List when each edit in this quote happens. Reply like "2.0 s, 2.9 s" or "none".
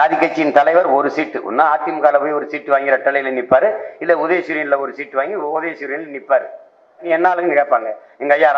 7.0 s